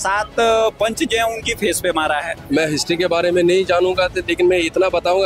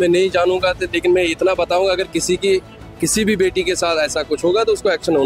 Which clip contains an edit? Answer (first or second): first